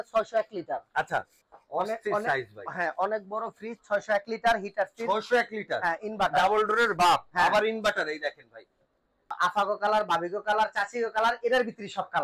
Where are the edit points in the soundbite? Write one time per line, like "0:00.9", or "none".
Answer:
0:01.4
0:09.3